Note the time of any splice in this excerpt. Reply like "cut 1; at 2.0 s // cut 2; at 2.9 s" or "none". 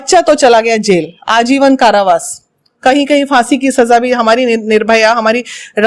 none